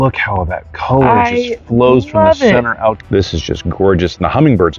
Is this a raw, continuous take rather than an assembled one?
no; 1 cut; at 3.0 s

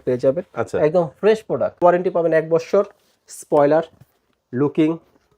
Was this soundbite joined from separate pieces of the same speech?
yes; 1 cut; at 1.8 s

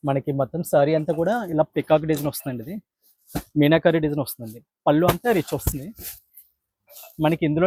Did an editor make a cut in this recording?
no; 0 cuts

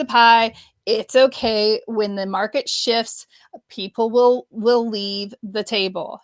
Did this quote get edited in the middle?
no; 0 cuts

